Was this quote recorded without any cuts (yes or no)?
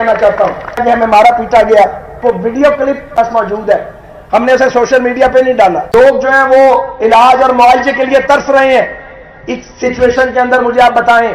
no